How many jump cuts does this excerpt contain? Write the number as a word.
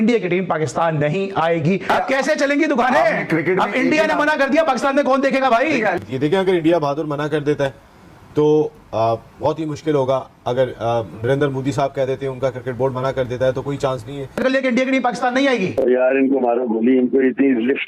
two